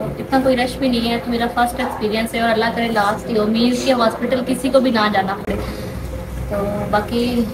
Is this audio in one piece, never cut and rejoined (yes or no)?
yes